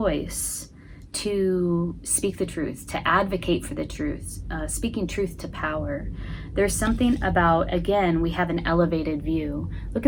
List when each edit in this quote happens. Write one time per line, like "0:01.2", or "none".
none